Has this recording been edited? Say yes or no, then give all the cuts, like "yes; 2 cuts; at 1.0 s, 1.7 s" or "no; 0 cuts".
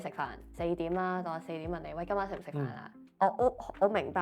no; 0 cuts